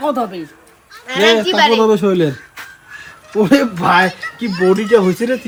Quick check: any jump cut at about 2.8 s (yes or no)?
no